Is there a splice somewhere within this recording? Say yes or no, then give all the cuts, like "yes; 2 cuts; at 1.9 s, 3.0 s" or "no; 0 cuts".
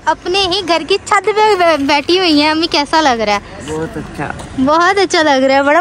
no; 0 cuts